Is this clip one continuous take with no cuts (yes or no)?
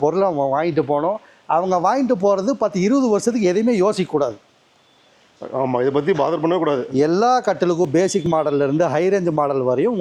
yes